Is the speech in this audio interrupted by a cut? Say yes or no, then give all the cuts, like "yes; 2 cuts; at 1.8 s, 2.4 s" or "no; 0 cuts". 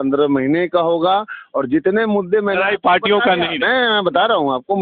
no; 0 cuts